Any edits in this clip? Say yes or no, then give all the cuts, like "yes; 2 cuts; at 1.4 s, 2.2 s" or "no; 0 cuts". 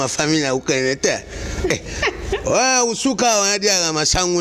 no; 0 cuts